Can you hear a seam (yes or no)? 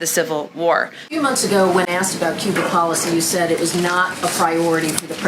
yes